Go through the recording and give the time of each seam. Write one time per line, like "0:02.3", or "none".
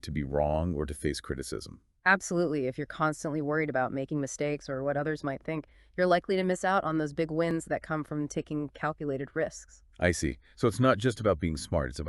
0:08.7